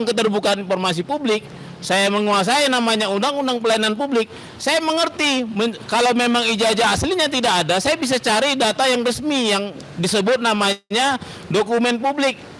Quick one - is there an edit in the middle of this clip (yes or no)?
no